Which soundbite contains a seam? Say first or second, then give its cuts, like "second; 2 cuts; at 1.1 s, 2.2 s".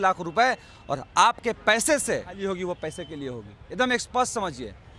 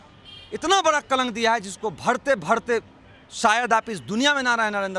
first; 1 cut; at 2.4 s